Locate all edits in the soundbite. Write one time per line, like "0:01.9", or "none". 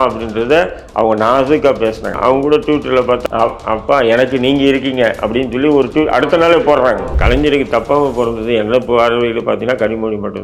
0:02.2
0:03.2
0:07.2